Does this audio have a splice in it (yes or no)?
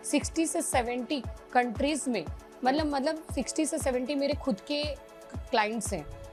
no